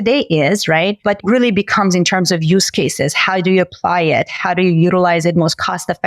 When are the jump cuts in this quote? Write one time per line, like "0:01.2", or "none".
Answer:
0:01.2